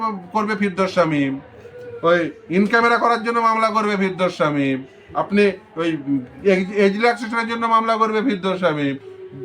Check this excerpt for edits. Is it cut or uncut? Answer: uncut